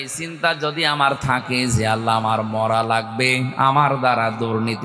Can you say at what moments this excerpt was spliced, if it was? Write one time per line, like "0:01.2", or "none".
none